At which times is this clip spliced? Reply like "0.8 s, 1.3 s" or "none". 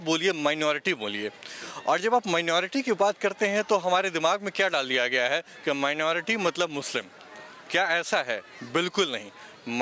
none